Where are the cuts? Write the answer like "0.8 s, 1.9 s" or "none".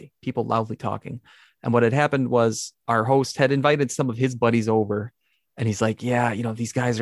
none